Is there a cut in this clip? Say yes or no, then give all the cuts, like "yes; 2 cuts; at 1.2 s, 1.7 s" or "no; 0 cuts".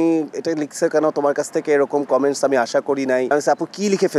yes; 1 cut; at 3.3 s